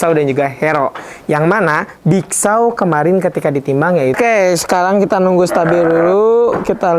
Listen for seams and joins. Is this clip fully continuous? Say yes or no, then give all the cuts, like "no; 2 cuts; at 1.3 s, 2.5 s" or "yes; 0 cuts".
no; 1 cut; at 4.1 s